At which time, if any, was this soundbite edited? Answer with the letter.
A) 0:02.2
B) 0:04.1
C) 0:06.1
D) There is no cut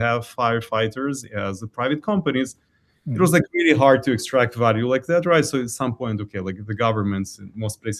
A